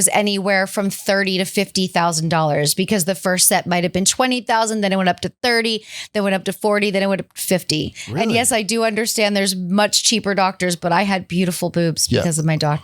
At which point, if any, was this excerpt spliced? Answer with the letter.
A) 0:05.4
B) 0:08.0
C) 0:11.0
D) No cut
B